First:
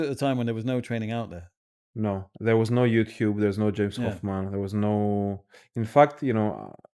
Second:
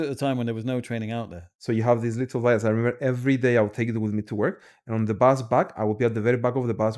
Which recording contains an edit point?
second; 1 cut; at 1.5 s

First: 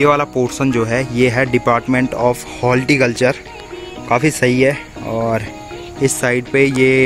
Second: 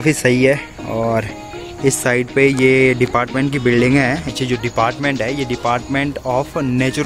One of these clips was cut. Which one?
second; 1 cut; at 4.3 s

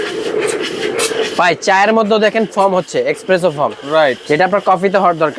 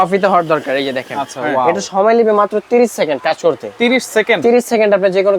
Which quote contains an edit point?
second; 1 cut; at 1.8 s

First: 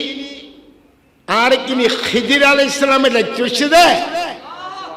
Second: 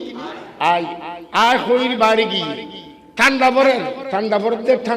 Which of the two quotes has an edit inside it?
second; 1 cut; at 4.0 s

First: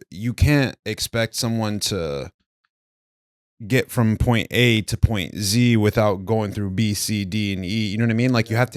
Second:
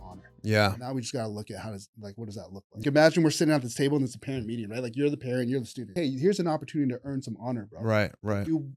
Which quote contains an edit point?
second; 2 cuts; at 2.8 s, 5.9 s

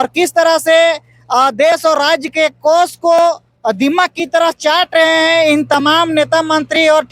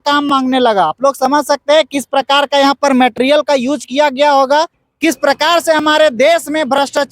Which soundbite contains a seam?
second; 1 cut; at 4.8 s

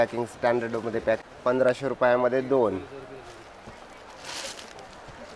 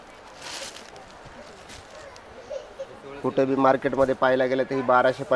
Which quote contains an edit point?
first; 1 cut; at 1.2 s

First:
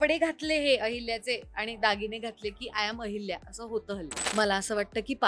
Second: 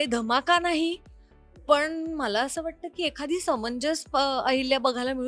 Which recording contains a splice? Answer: first; 1 cut; at 4.2 s

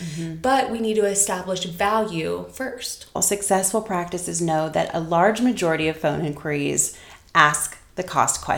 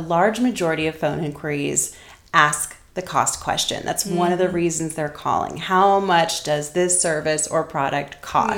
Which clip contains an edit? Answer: first; 1 cut; at 3.2 s

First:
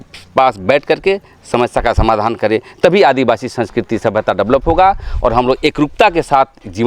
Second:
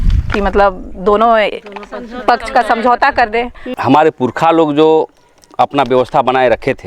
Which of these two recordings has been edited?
second; 1 cut; at 3.6 s

